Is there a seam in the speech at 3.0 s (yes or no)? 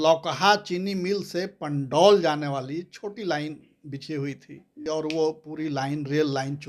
no